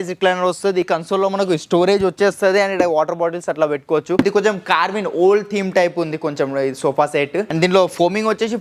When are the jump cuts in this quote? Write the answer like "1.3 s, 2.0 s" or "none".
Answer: 0.9 s, 4.2 s, 7.5 s